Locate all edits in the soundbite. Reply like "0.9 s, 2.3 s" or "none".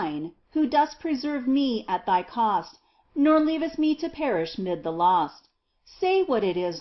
2.1 s

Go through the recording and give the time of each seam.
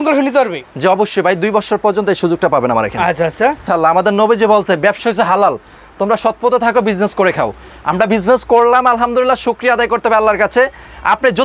3.6 s

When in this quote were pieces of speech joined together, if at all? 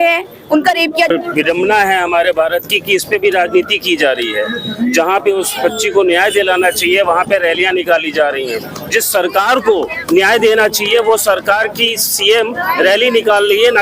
1.1 s

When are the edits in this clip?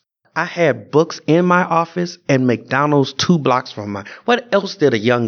none

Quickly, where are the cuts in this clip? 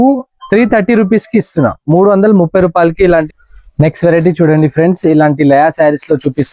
3.3 s

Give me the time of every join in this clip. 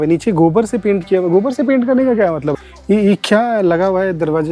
2.5 s

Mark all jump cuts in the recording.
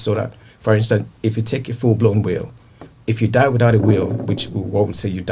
none

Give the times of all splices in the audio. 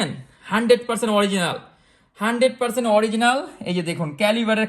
none

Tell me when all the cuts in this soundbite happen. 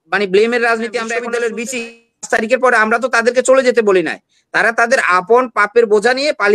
1.1 s

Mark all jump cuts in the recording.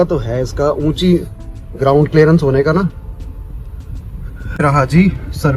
none

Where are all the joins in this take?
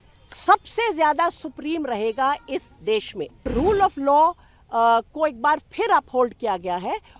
3.5 s

